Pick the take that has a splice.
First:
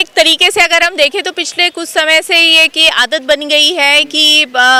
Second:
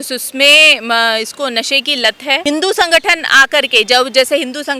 second; 1 cut; at 2.4 s

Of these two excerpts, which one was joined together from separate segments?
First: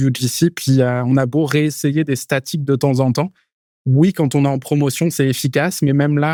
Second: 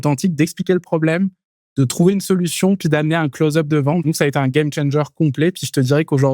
second; 1 cut; at 4.1 s

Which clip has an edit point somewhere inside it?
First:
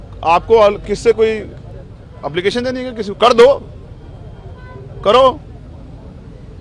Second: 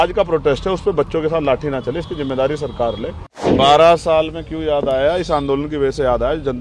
second; 1 cut; at 3.5 s

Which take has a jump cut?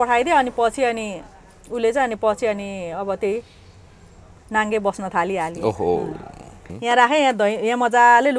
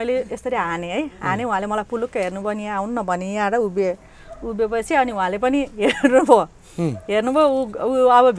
first; 1 cut; at 6.7 s

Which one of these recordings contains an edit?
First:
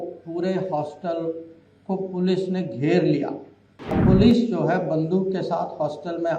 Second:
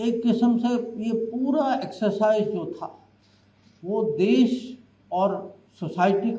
first; 1 cut; at 4.0 s

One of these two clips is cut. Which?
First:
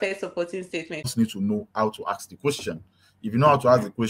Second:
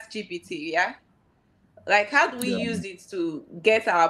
first; 1 cut; at 1.1 s

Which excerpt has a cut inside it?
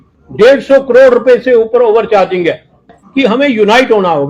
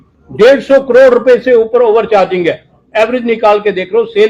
first; 1 cut; at 2.9 s

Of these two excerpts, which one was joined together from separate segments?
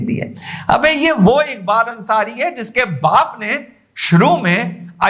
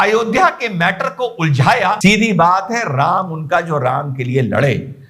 second; 1 cut; at 2.0 s

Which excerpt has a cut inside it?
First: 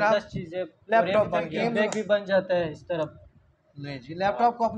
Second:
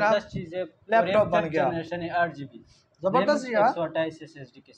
first; 1 cut; at 1.5 s

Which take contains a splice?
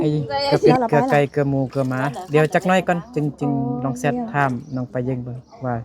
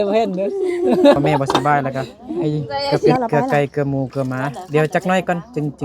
second; 1 cut; at 1.2 s

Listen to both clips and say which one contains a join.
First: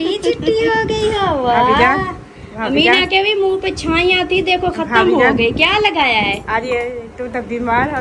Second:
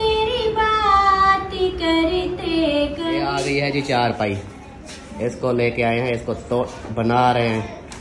second; 1 cut; at 3.3 s

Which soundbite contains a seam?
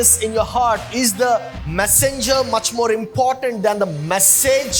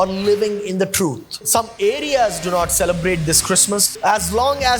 second; 2 cuts; at 1.4 s, 3.9 s

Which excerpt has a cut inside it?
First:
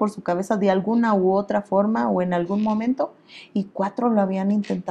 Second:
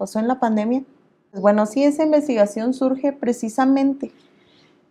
second; 1 cut; at 1.4 s

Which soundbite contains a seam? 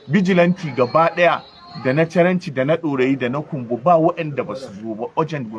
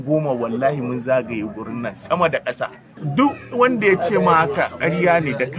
second; 1 cut; at 2.9 s

